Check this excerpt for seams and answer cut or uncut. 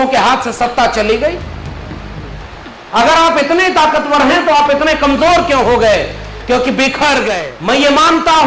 cut